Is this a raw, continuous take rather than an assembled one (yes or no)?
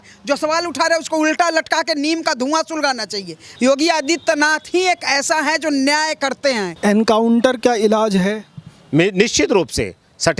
no